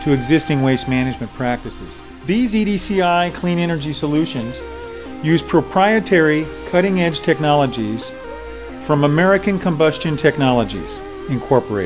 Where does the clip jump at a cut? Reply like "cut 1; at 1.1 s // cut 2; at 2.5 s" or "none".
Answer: cut 1; at 10.1 s